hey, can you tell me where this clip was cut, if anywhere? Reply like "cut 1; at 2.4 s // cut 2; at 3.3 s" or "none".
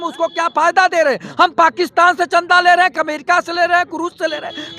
none